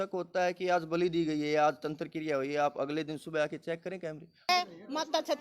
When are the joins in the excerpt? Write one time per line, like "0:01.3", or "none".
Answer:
0:04.5

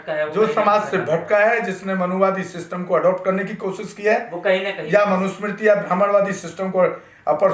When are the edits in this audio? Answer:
none

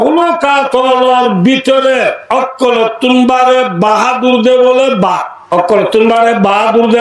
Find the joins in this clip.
0:02.2
0:05.3

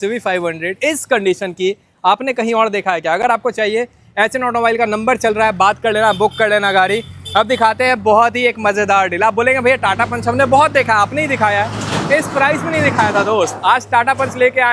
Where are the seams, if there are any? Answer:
none

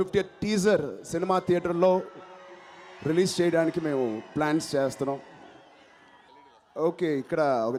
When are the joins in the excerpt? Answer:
none

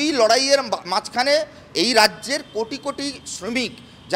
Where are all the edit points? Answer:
none

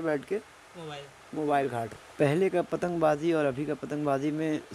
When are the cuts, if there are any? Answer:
0:02.0

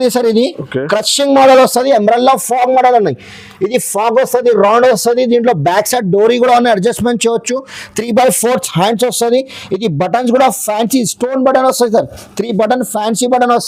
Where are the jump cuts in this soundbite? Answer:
none

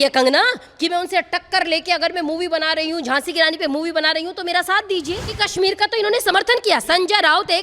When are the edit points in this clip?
0:05.3

